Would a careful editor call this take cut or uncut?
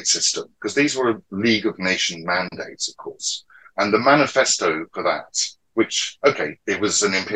uncut